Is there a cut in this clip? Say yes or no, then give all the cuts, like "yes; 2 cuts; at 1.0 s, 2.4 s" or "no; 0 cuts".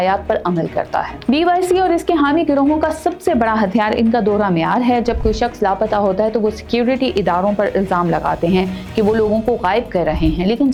no; 0 cuts